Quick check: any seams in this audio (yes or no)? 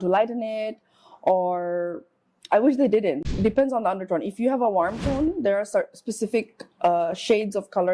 yes